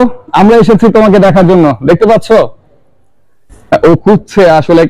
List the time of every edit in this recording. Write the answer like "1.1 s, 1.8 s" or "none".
none